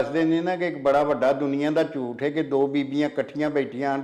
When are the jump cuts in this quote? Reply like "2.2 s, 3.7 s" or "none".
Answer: none